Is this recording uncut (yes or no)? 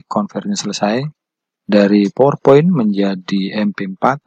yes